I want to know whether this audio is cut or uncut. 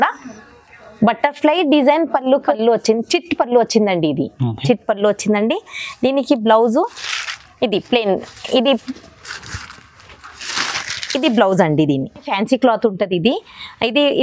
cut